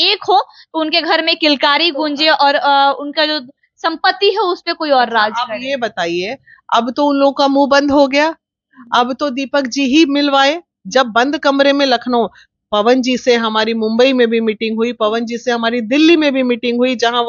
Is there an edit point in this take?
no; 0 cuts

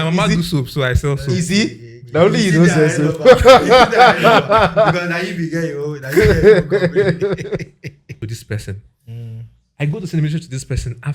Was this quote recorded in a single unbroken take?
no; 1 cut; at 8.2 s

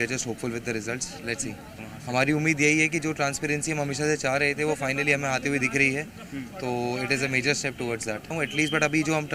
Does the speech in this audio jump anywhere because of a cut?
yes; 2 cuts; at 1.8 s, 8.3 s

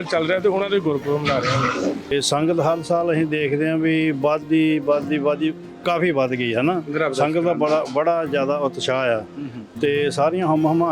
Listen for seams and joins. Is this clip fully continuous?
no; 1 cut; at 2.1 s

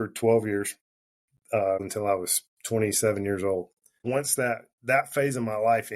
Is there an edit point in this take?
yes; 2 cuts; at 1.8 s, 4.0 s

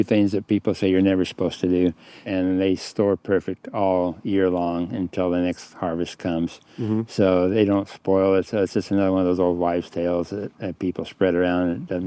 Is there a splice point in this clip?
yes; 1 cut; at 2.2 s

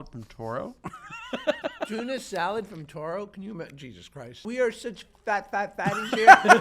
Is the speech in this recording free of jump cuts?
no; 2 cuts; at 1.9 s, 4.4 s

